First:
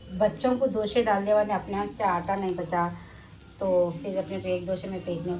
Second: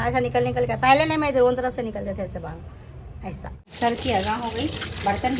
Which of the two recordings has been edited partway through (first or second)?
second